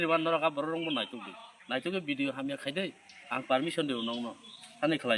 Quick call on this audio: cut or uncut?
uncut